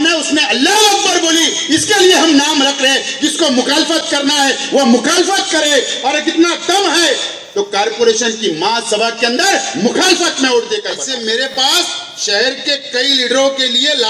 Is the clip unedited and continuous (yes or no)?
no